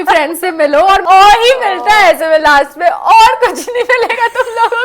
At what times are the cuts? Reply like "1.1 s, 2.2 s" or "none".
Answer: 1.0 s